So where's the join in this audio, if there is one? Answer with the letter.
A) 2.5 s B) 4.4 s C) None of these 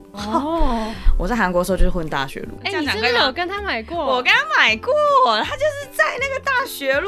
A